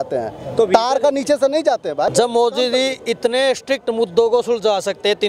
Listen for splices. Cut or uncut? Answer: cut